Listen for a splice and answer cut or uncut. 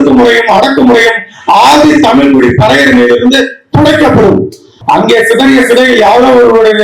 cut